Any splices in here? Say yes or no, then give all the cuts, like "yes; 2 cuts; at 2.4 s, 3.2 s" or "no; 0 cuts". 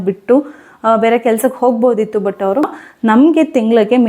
yes; 1 cut; at 2.7 s